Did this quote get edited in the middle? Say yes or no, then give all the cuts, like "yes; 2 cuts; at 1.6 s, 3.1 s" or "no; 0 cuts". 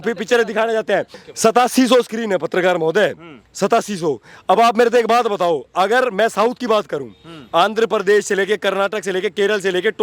yes; 1 cut; at 1.2 s